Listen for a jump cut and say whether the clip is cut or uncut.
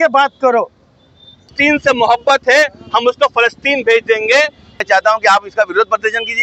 cut